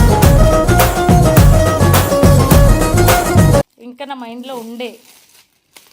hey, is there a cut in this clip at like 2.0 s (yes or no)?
no